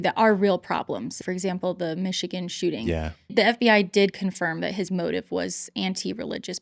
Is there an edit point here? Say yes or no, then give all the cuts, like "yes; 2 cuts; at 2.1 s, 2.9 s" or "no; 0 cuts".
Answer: yes; 2 cuts; at 1.2 s, 3.3 s